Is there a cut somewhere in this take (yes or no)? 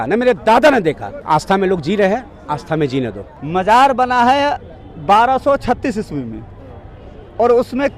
yes